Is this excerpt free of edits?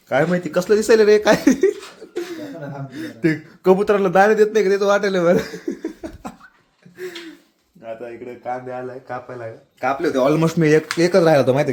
yes; 0 cuts

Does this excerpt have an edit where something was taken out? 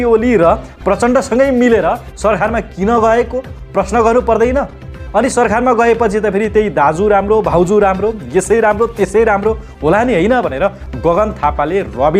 no; 0 cuts

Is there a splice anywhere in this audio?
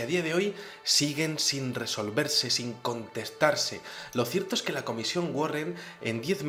no; 0 cuts

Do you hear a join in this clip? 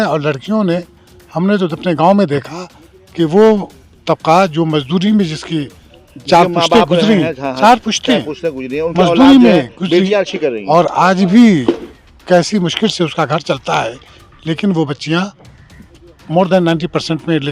no; 0 cuts

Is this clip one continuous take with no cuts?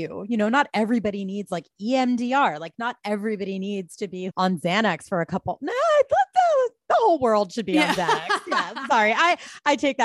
yes; 0 cuts

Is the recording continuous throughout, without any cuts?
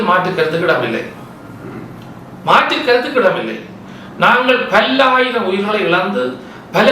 yes; 0 cuts

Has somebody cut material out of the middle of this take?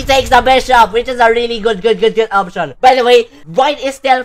no; 0 cuts

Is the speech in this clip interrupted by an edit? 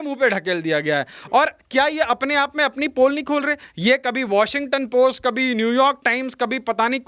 no; 0 cuts

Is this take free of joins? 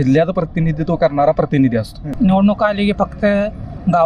no; 1 cut; at 2.1 s

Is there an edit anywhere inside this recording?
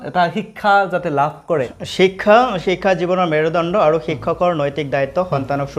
yes; 1 cut; at 1.8 s

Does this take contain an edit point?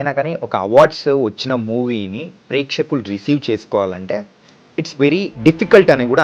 no; 0 cuts

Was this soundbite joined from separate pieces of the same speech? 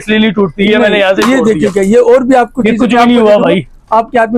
no; 0 cuts

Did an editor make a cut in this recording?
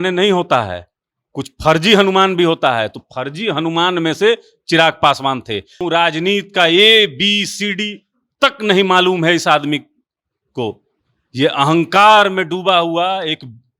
yes; 1 cut; at 5.8 s

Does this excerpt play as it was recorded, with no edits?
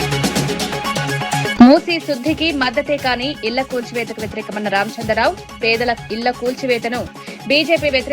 no; 1 cut; at 1.5 s

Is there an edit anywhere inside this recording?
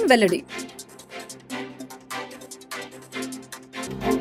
no; 0 cuts

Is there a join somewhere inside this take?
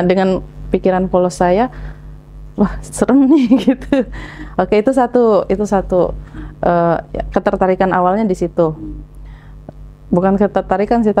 no; 0 cuts

